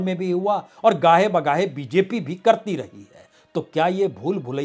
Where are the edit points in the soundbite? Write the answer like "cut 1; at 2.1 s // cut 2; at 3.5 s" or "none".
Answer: none